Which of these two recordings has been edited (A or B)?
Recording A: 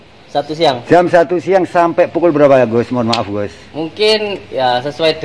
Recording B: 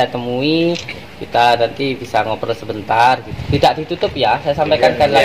B